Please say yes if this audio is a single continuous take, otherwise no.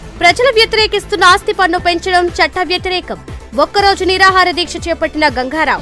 yes